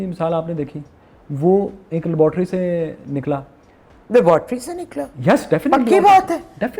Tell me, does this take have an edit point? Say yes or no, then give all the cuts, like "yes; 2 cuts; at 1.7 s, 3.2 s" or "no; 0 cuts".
no; 0 cuts